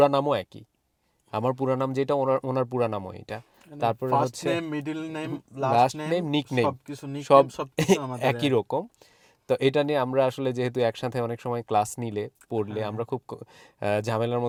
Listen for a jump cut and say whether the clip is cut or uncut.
uncut